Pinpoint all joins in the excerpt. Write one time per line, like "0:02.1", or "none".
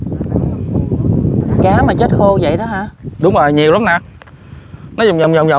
0:01.4